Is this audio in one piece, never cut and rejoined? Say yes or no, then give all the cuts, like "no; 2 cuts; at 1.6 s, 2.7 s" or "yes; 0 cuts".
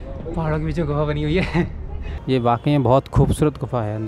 no; 1 cut; at 2.1 s